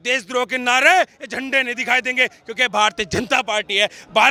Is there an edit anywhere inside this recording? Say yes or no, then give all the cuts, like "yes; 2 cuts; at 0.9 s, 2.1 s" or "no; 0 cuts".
no; 0 cuts